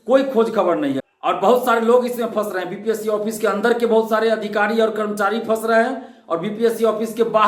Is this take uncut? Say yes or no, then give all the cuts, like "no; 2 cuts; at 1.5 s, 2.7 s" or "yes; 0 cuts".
no; 1 cut; at 1.0 s